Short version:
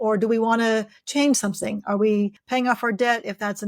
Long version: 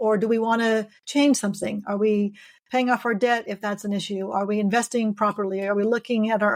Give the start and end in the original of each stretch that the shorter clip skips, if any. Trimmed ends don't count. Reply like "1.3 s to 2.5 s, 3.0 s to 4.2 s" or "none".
2.4 s to 2.6 s